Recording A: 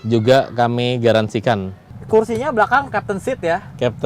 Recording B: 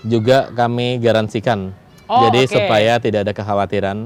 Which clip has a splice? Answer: A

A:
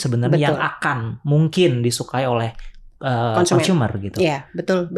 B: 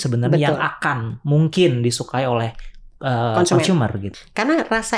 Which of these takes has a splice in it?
B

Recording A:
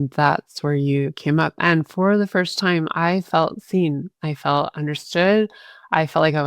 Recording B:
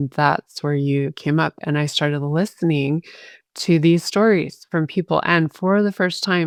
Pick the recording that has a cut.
A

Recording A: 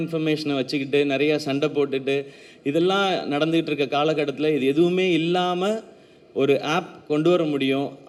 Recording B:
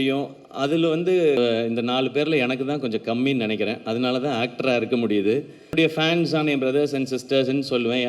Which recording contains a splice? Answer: B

